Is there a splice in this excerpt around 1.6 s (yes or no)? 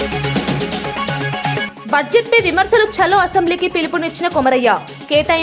yes